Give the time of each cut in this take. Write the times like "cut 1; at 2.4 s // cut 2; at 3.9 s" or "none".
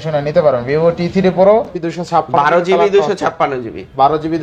cut 1; at 1.7 s